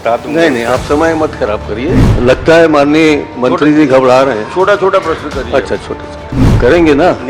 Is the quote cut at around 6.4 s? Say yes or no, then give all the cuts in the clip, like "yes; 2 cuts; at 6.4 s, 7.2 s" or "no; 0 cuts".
yes; 2 cuts; at 2.1 s, 6.4 s